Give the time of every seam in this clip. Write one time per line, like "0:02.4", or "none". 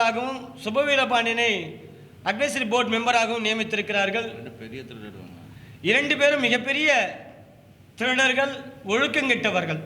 none